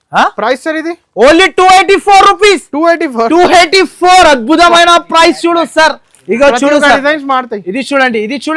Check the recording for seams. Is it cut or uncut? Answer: uncut